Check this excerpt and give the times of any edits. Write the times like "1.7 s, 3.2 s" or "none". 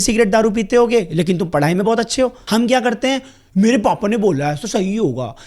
2.4 s